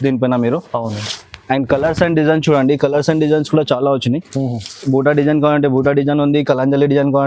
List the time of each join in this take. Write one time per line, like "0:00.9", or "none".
none